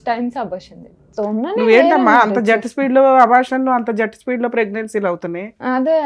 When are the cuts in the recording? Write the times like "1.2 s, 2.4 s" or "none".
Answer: 1.1 s